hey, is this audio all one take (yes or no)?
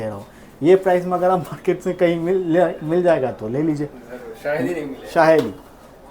yes